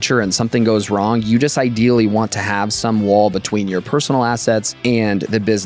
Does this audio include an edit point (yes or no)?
yes